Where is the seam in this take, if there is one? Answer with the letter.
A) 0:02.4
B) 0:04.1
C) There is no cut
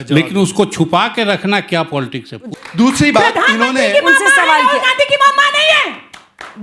A